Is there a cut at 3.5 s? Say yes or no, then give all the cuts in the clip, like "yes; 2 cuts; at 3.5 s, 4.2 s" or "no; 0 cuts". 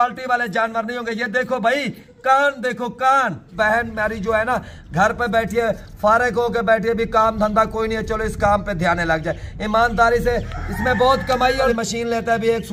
yes; 2 cuts; at 3.5 s, 11.7 s